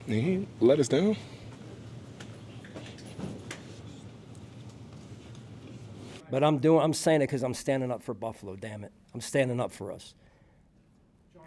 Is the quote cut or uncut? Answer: cut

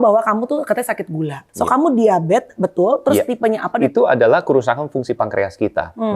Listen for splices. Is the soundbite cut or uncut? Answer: cut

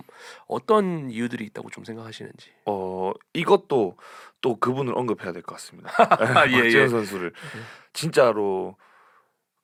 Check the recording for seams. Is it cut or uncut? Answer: uncut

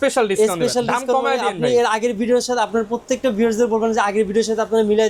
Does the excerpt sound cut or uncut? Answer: uncut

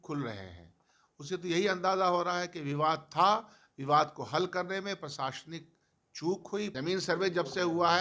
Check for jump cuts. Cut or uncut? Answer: cut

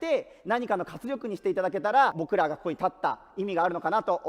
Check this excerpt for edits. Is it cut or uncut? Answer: cut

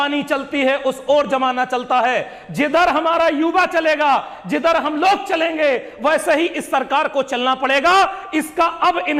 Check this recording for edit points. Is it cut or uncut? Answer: uncut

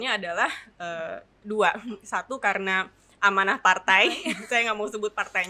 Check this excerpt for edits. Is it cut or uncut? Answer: uncut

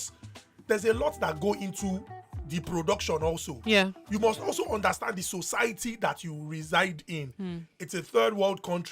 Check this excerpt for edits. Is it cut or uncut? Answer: uncut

